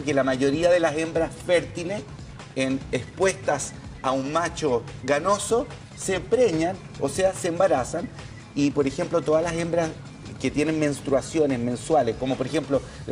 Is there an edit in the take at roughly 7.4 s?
yes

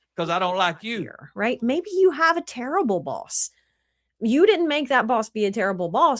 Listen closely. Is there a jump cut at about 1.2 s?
yes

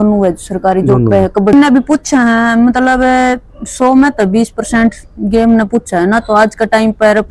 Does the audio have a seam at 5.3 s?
no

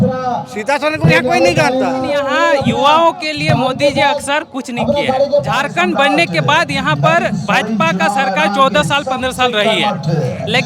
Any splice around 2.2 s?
yes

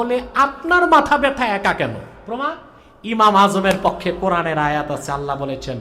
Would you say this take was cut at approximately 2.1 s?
yes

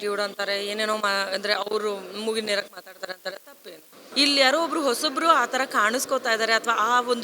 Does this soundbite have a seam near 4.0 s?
yes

